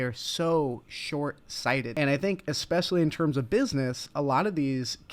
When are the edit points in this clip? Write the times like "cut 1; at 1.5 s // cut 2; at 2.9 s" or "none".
cut 1; at 1.9 s